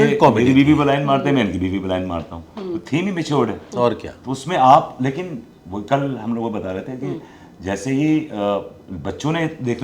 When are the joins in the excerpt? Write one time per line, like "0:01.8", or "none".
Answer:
none